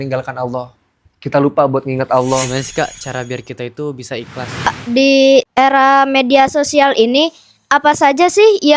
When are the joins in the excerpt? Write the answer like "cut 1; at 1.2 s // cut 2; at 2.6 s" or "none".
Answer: cut 1; at 2.5 s // cut 2; at 4.7 s // cut 3; at 5.5 s